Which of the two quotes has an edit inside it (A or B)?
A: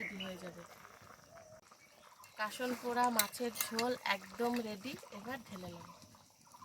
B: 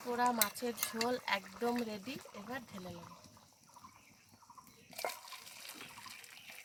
A